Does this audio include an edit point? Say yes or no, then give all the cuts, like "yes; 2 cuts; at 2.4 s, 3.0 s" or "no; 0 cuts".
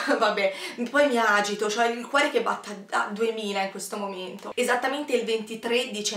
yes; 1 cut; at 4.4 s